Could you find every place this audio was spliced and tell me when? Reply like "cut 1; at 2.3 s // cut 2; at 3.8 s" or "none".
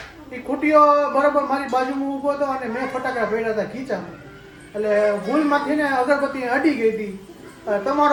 none